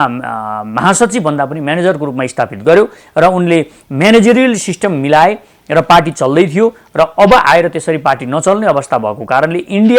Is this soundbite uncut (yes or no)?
yes